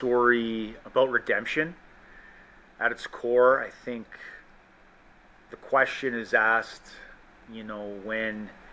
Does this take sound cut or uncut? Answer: uncut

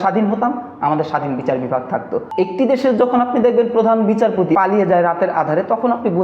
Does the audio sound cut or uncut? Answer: cut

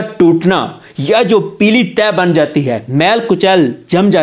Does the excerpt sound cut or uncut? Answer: uncut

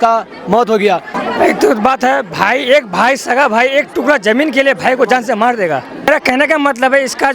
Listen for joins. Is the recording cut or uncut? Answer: cut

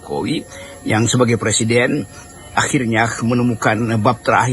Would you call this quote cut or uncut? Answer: uncut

